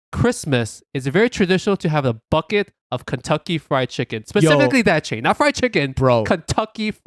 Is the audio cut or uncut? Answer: uncut